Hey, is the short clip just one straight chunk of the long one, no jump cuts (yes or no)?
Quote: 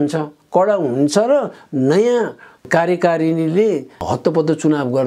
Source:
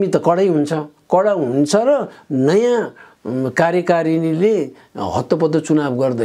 no